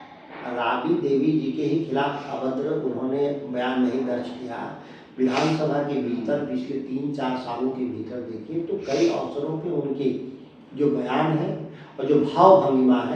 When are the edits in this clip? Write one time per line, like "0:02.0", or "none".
none